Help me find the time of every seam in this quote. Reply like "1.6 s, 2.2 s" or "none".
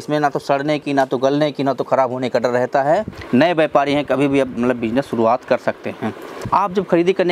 3.2 s, 6.5 s